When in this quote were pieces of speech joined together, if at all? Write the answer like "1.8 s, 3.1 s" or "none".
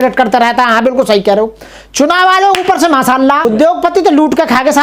3.5 s